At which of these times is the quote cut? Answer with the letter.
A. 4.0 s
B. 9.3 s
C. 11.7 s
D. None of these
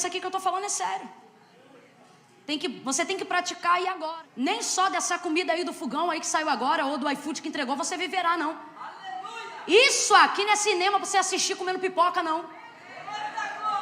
A